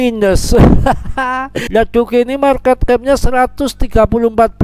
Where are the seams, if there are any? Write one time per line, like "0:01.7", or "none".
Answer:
0:01.9